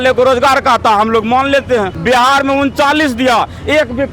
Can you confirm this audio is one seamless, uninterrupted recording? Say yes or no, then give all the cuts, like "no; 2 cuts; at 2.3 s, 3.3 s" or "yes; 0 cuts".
no; 1 cut; at 1.9 s